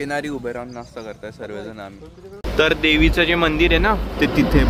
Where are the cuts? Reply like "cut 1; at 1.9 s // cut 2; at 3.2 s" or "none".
cut 1; at 2.4 s